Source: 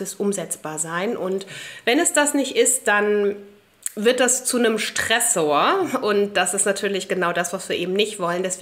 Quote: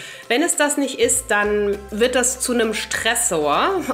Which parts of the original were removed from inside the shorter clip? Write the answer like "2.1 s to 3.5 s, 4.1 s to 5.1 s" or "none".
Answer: 3.4 s to 3.9 s